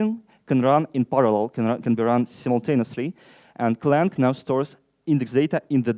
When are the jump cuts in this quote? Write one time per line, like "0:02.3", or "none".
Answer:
none